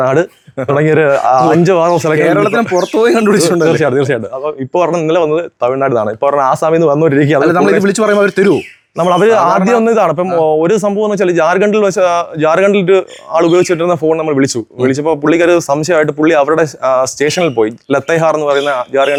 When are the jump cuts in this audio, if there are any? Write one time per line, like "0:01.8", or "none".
none